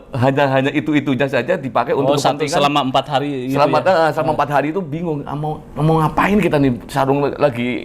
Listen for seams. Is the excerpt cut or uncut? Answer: uncut